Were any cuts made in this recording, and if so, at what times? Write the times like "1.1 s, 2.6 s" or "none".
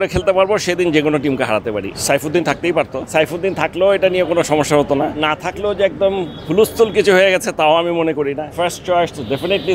1.9 s, 3.1 s, 5.2 s, 8.5 s